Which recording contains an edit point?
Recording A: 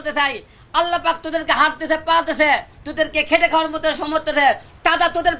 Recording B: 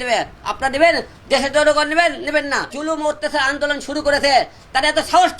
B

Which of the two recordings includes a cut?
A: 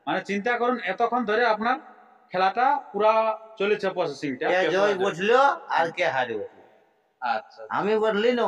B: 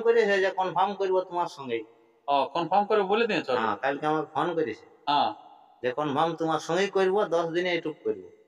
A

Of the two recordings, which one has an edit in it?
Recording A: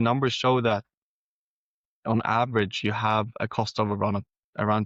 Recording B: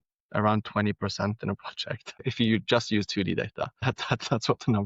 B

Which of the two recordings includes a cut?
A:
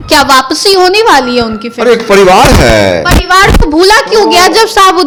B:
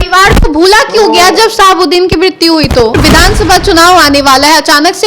B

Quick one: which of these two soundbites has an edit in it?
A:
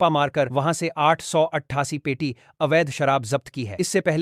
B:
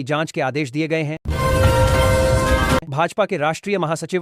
B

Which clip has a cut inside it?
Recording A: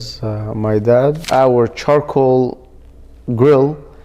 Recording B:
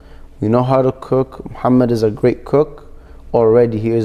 A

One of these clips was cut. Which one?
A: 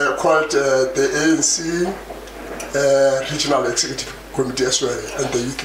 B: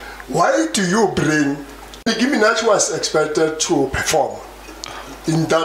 B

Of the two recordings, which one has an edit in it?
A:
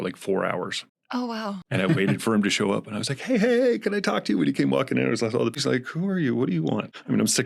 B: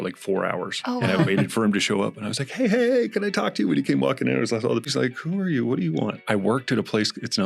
B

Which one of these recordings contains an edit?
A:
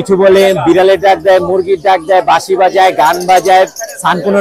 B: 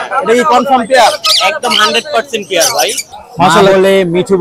B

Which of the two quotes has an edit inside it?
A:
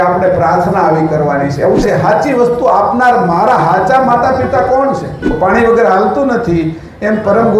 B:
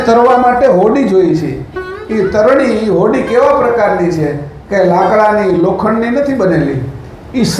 A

